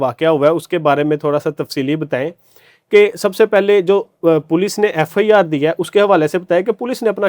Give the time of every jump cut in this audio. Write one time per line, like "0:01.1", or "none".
none